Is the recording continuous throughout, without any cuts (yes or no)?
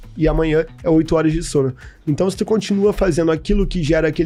yes